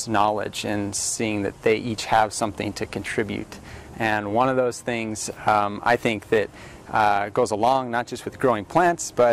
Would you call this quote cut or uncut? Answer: uncut